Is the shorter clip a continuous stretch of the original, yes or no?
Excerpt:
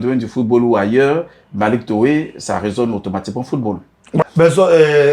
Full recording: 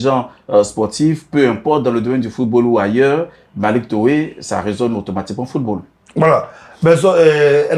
no